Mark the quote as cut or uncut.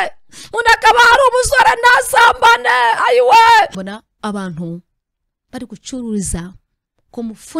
cut